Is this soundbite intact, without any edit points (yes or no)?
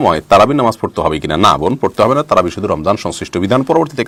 yes